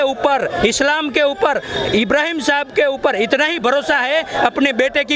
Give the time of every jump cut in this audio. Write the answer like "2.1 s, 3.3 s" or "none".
none